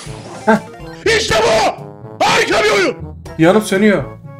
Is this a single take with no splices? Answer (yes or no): no